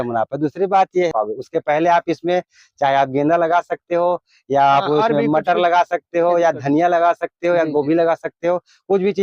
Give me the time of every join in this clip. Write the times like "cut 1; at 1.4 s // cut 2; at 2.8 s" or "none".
cut 1; at 1.1 s